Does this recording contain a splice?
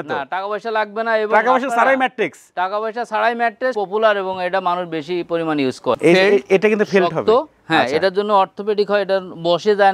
yes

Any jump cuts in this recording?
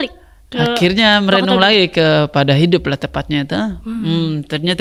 no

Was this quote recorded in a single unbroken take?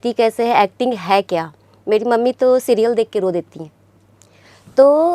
yes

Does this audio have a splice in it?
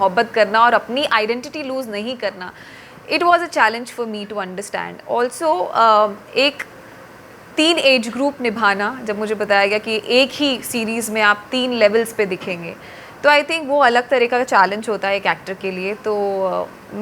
no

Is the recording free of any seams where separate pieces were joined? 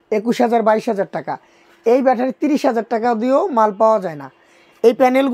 yes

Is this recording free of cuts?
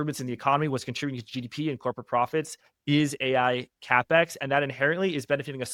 yes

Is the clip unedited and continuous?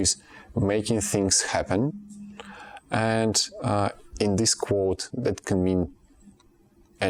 yes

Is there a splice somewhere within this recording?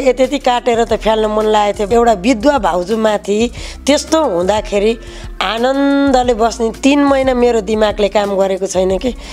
yes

